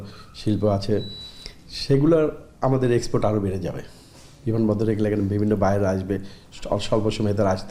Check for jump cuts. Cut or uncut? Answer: uncut